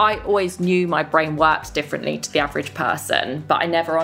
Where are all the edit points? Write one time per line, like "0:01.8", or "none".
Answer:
none